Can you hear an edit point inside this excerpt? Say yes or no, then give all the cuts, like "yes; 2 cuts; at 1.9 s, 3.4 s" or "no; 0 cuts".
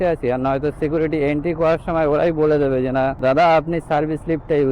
yes; 1 cut; at 3.2 s